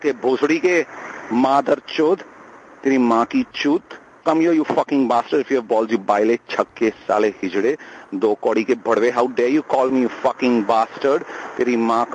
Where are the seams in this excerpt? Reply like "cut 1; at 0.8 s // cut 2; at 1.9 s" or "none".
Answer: none